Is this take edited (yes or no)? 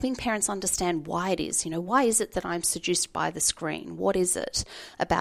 yes